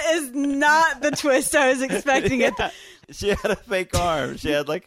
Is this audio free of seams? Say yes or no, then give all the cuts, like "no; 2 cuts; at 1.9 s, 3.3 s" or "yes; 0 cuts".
no; 1 cut; at 2.9 s